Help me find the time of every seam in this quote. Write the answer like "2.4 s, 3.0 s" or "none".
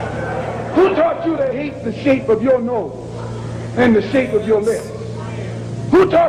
none